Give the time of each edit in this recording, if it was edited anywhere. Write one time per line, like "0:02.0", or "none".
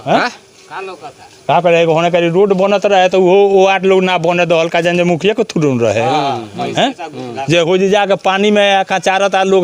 none